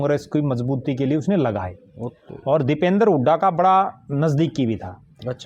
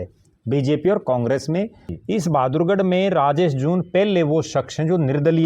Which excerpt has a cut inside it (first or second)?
second